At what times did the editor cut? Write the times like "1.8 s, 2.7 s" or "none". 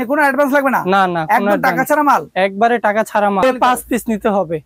3.4 s